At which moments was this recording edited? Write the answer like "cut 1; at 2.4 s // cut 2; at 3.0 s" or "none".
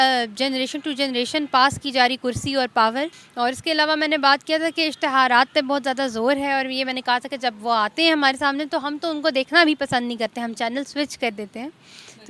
cut 1; at 3.2 s